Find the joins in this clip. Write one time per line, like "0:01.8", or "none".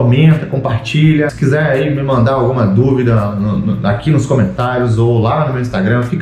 0:01.3